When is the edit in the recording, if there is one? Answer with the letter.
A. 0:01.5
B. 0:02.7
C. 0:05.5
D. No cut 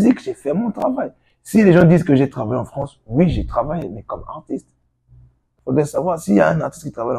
C